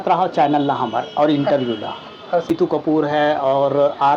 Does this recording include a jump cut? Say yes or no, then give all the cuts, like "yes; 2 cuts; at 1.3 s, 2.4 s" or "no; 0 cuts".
yes; 1 cut; at 2.5 s